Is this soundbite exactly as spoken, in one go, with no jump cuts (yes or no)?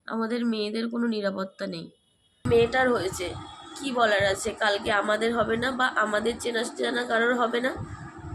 no